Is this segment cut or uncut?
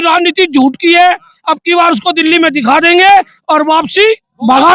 uncut